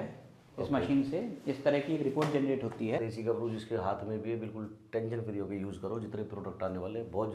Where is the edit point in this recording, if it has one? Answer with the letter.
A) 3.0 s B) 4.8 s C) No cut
A